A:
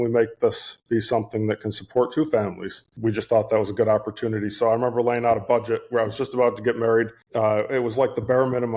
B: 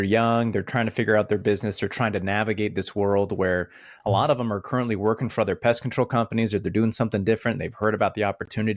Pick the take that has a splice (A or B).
A